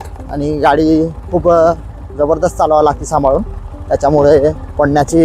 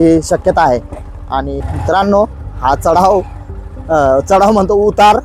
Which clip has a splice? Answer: second; 1 cut; at 1.5 s

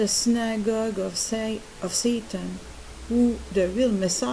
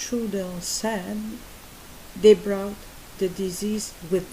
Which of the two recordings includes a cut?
first; 1 cut; at 1.7 s

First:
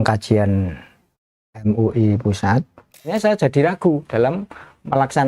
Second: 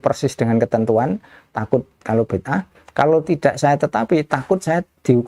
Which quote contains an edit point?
first; 1 cut; at 3.1 s

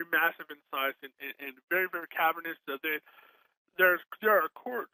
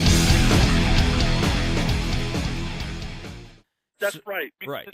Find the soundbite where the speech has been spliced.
second; 1 cut; at 3.8 s

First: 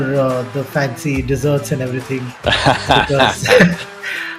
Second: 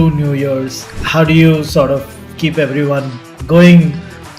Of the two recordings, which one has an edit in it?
second; 1 cut; at 3.3 s

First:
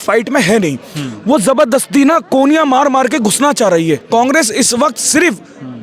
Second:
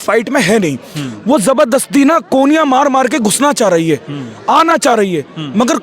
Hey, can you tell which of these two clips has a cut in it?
first; 1 cut; at 4.0 s

